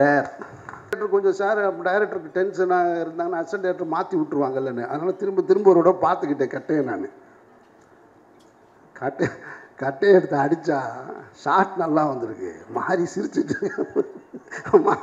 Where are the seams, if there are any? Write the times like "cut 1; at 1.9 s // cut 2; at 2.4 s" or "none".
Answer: cut 1; at 1.0 s